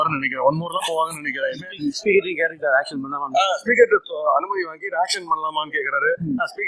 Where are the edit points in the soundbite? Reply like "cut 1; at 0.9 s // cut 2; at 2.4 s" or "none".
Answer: none